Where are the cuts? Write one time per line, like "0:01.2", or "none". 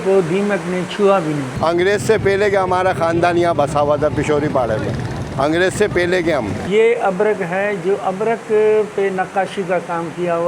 0:01.5
0:06.6